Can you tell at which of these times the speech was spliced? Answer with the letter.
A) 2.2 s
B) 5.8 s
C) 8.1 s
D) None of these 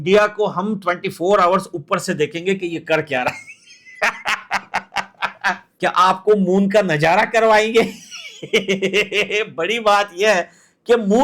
B